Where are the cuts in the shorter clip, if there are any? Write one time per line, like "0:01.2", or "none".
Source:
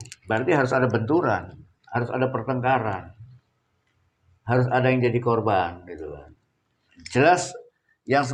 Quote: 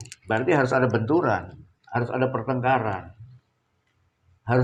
none